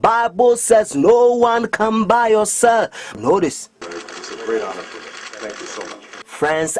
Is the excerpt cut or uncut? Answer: uncut